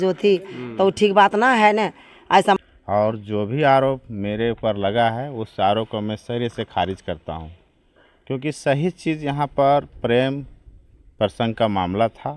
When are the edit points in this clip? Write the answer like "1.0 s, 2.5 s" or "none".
2.6 s